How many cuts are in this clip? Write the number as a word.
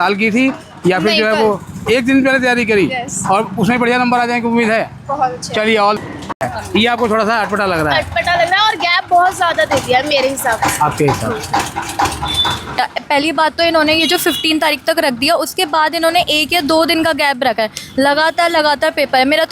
two